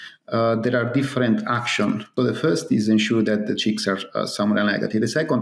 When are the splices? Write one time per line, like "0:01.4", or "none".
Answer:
0:02.1